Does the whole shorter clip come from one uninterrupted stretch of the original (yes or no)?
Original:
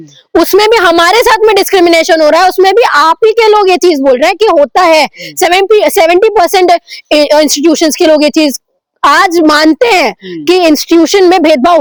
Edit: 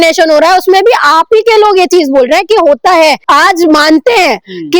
no